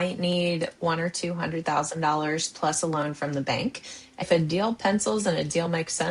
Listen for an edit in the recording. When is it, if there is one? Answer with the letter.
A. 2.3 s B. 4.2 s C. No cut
B